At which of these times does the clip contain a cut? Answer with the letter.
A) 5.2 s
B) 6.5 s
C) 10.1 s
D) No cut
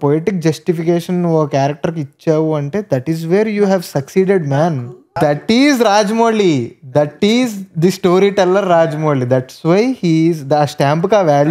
A